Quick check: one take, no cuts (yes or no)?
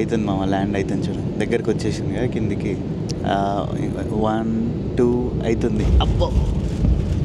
yes